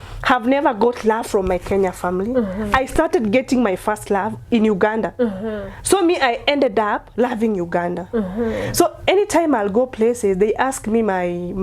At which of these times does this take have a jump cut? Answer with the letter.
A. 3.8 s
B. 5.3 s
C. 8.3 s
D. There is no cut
D